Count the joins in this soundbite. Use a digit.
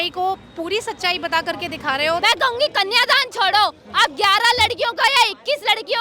1